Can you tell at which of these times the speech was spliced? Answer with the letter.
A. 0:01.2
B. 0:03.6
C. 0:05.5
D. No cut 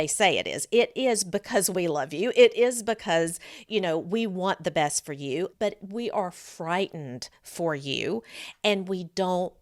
C